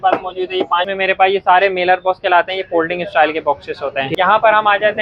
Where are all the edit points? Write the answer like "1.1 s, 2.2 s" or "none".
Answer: 0.9 s, 4.1 s